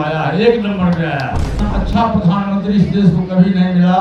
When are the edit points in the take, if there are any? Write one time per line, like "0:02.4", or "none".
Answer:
0:01.5